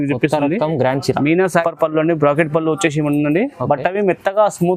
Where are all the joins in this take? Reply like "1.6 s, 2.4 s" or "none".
1.6 s